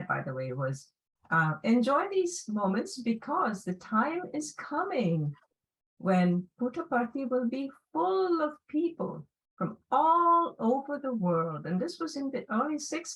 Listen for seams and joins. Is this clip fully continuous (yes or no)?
yes